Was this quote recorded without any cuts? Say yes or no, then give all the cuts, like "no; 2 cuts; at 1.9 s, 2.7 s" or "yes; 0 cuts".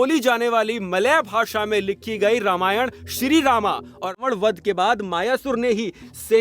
no; 1 cut; at 4.2 s